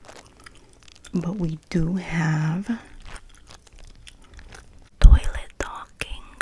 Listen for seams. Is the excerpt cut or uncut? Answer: cut